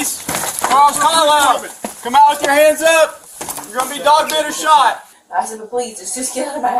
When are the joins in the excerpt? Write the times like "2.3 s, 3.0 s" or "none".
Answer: 5.1 s